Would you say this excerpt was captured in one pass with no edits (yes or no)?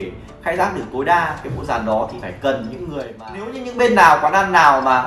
no